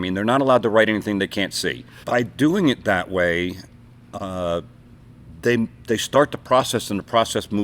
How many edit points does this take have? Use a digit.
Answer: 1